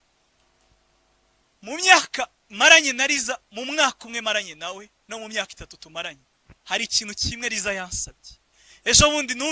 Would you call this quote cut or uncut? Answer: cut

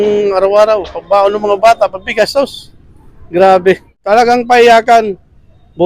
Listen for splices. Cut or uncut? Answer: cut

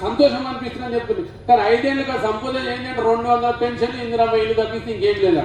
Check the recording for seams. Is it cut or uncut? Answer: uncut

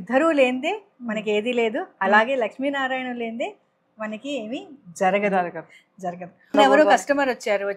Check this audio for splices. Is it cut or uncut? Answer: cut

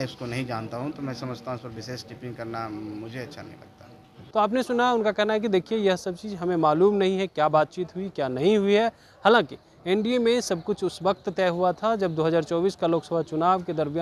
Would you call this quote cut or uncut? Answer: uncut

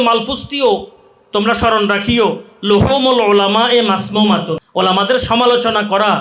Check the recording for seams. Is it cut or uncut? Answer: cut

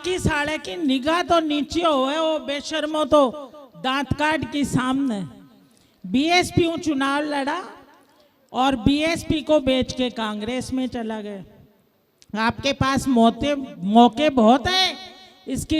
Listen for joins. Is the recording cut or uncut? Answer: uncut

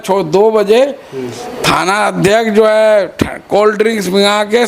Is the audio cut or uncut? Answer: uncut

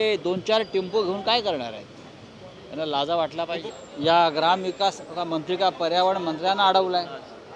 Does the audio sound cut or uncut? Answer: cut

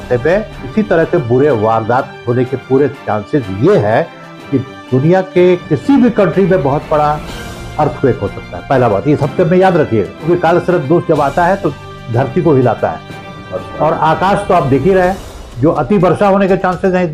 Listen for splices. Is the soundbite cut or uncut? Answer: uncut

